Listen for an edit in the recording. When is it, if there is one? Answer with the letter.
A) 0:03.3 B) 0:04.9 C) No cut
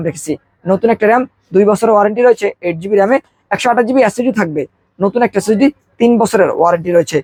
C